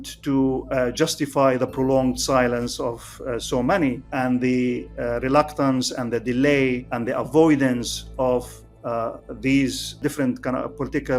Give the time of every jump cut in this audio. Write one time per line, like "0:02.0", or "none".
0:04.0
0:06.9
0:10.0